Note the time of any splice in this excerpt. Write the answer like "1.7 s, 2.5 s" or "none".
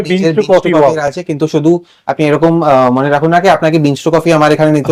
none